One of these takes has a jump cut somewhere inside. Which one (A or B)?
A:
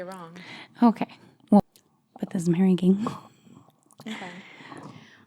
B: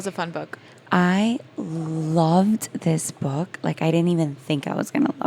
A